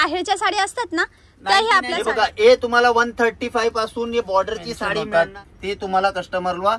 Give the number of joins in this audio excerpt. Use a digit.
2